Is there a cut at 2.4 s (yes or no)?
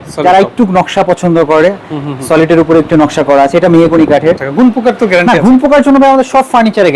no